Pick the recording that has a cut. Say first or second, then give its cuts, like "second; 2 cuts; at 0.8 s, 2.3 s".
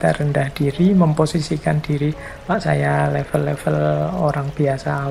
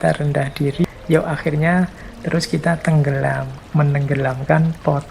second; 2 cuts; at 0.8 s, 3.5 s